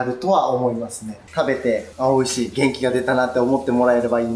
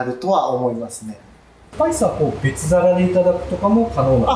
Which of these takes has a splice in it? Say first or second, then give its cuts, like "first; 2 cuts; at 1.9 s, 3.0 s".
first; 1 cut; at 1.2 s